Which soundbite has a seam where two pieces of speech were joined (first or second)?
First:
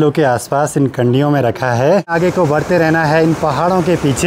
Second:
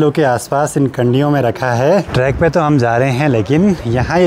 first